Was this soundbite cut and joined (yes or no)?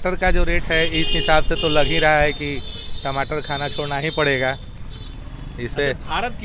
no